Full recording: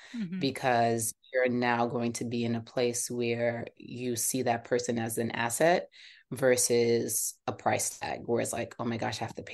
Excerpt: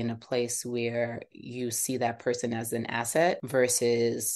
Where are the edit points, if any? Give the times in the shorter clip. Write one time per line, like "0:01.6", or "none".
0:03.4